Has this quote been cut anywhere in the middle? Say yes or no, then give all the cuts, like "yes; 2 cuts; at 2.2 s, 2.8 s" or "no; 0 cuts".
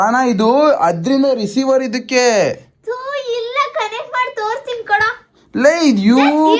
no; 0 cuts